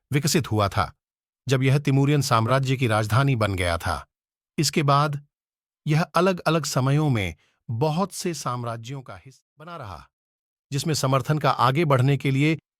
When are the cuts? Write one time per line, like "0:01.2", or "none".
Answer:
0:09.2